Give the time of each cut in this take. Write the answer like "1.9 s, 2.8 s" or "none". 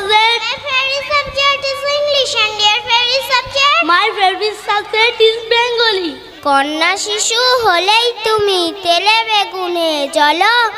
6.3 s